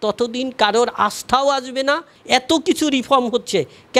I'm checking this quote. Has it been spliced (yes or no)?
yes